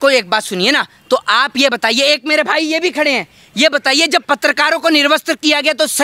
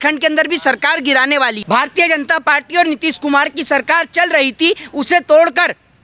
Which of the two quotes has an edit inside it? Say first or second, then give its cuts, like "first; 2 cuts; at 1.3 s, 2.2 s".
second; 1 cut; at 1.6 s